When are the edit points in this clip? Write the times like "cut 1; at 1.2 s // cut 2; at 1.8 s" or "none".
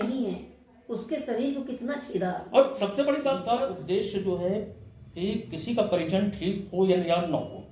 cut 1; at 3.4 s